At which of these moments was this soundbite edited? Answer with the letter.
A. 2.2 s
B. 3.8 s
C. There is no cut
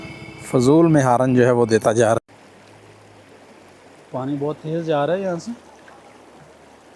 A